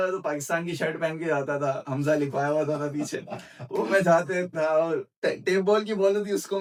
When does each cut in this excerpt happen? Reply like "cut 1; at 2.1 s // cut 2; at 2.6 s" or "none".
none